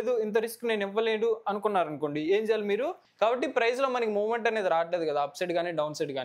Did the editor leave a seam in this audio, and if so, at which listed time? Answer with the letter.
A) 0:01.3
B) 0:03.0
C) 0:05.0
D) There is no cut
B